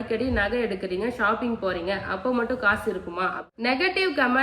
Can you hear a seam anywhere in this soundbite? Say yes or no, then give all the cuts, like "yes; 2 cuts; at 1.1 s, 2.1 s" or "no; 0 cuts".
yes; 1 cut; at 3.4 s